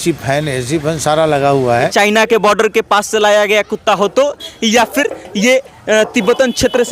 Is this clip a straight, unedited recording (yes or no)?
no